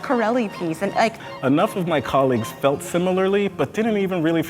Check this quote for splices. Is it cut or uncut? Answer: cut